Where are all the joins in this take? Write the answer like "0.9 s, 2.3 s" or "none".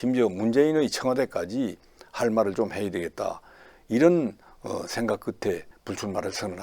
5.7 s

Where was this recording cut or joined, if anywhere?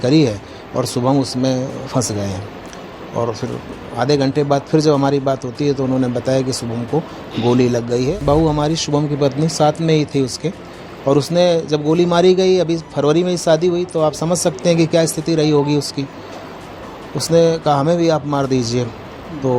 8.1 s

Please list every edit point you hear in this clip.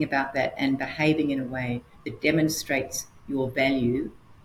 none

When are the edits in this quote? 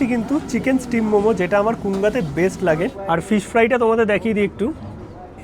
3.0 s

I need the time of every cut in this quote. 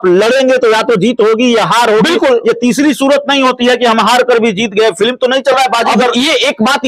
none

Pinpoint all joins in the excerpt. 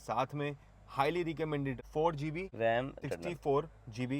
1.8 s, 2.9 s

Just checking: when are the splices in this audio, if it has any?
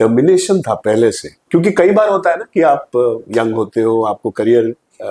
1.3 s, 3.2 s

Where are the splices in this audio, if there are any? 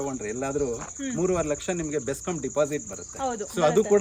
none

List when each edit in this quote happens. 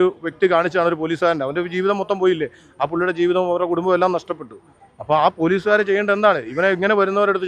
none

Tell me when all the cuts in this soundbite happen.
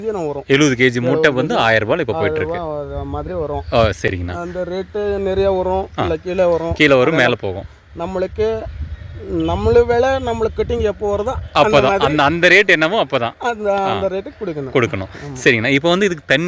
none

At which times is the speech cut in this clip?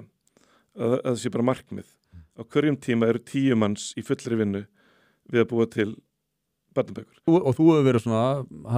7.2 s

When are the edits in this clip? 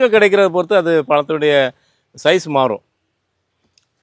none

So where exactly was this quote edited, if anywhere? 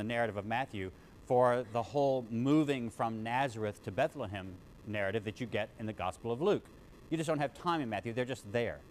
7.6 s

